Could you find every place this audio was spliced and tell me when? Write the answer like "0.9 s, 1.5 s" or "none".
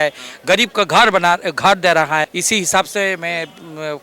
2.3 s